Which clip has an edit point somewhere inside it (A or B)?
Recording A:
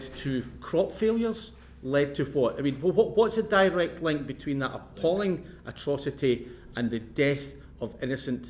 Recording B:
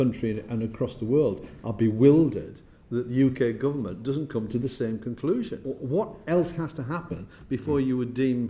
B